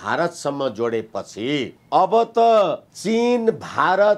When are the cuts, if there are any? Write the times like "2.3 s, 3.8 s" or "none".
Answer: 1.8 s, 2.9 s